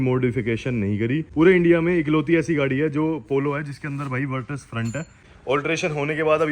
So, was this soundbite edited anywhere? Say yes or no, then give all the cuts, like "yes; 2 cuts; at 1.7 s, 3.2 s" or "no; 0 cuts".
yes; 2 cuts; at 1.3 s, 5.3 s